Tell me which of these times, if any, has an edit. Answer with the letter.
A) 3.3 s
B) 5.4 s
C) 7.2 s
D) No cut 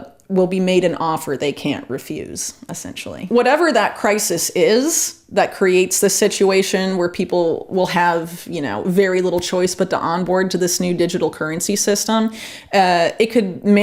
A